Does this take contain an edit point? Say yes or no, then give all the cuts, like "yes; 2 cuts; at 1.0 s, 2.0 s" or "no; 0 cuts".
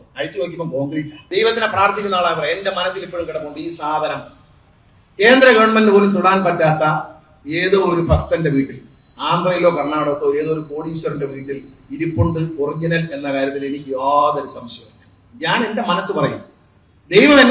yes; 1 cut; at 1.2 s